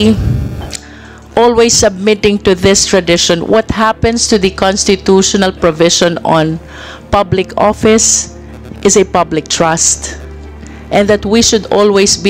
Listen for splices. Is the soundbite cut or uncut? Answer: uncut